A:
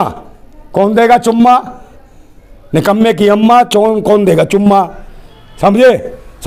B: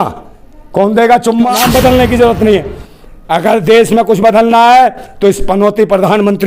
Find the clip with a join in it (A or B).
B